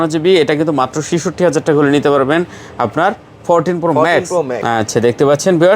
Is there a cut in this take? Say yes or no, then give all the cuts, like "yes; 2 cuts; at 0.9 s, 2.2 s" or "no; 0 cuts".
yes; 1 cut; at 4.6 s